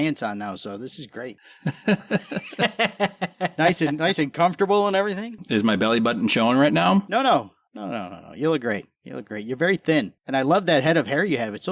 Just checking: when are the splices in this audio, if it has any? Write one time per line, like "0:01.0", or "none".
0:05.4
0:07.1